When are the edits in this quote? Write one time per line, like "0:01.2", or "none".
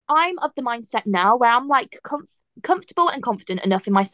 none